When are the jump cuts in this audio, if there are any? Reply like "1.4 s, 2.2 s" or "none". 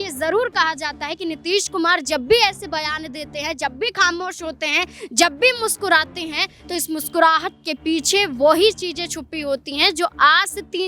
none

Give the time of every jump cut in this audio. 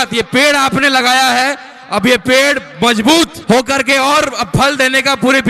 3.6 s

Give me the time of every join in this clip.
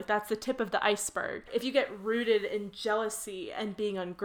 1.5 s

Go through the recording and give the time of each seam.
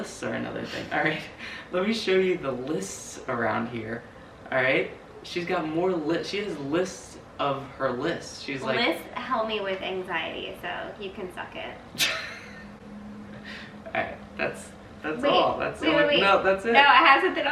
none

